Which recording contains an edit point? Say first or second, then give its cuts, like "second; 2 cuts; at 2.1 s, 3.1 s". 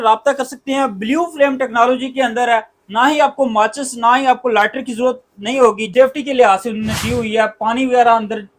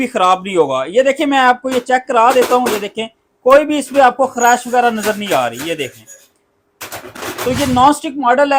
first; 1 cut; at 5.9 s